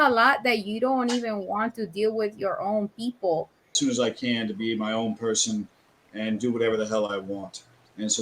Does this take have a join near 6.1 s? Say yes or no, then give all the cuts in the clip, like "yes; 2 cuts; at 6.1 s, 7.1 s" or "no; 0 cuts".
no; 1 cut; at 3.8 s